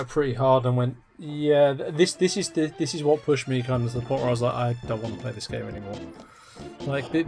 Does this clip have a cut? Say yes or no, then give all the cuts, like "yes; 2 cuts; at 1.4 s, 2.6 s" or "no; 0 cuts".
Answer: no; 0 cuts